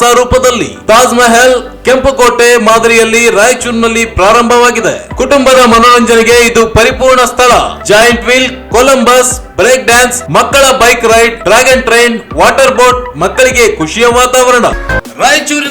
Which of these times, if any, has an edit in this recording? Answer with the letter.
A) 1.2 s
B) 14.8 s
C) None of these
B